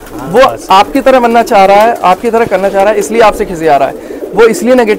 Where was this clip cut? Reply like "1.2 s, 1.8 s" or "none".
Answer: none